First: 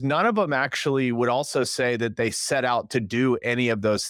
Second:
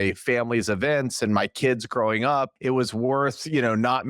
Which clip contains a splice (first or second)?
second